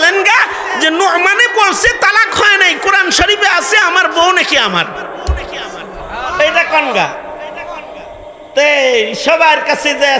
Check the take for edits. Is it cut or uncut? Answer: uncut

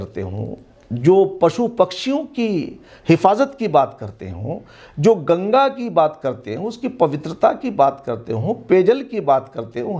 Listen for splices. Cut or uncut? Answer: uncut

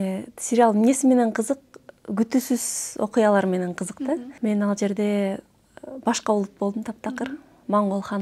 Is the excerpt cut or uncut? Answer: cut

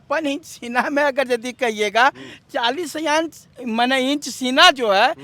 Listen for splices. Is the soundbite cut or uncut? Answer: uncut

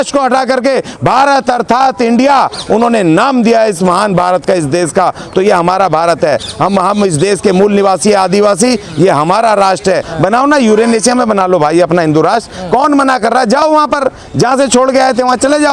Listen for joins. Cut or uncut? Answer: cut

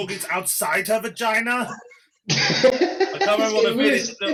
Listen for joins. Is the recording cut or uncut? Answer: uncut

